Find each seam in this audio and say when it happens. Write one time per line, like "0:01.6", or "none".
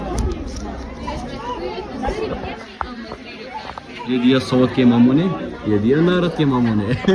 none

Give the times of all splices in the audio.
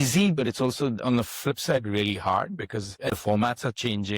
0:03.1

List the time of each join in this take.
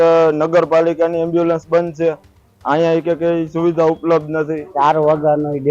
0:04.7

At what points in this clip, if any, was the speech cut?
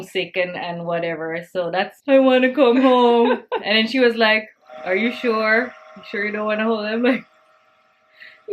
0:02.0

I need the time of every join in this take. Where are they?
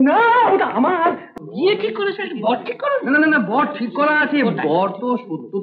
0:01.3

